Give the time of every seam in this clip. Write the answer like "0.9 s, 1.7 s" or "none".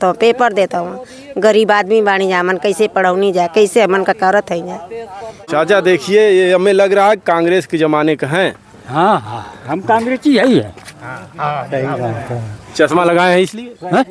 5.5 s